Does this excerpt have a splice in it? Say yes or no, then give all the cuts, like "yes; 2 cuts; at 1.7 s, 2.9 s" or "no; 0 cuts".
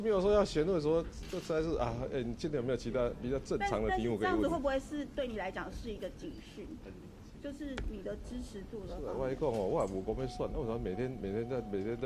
no; 0 cuts